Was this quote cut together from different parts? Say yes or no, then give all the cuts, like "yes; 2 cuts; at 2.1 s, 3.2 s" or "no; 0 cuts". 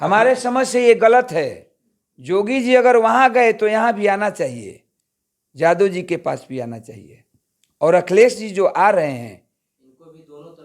no; 0 cuts